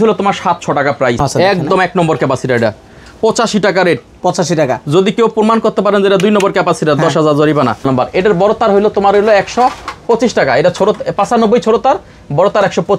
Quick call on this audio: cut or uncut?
cut